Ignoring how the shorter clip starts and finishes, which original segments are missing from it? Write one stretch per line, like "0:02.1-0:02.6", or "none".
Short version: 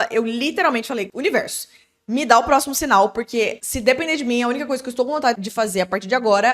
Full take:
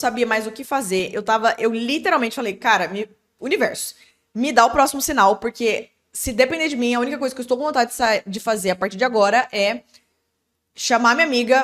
0:02.6-0:03.4
0:05.9-0:06.2
0:07.9-0:08.3